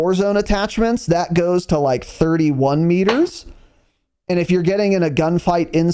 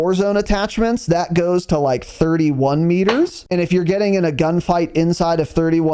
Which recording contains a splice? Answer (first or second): second